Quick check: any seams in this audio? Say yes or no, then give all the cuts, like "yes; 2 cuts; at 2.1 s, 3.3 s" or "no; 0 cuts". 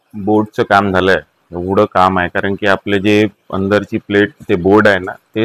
no; 0 cuts